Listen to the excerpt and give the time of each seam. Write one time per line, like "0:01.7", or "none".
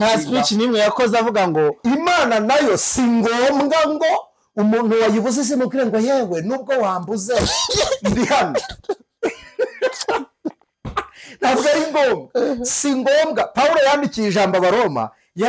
0:01.8